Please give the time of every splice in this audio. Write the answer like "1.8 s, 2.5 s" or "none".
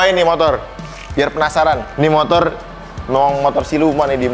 none